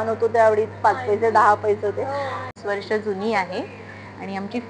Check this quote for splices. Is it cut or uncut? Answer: cut